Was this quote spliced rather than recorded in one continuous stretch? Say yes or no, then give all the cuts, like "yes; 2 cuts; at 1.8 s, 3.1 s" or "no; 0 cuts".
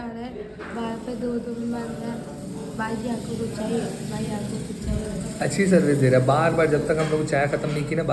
no; 0 cuts